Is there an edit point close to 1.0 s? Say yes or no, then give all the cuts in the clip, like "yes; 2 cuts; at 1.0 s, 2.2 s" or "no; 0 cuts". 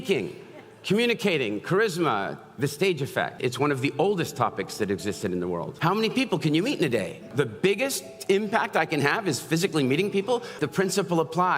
no; 4 cuts; at 3.4 s, 5.7 s, 7.3 s, 10.6 s